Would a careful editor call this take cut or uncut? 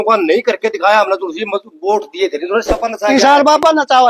cut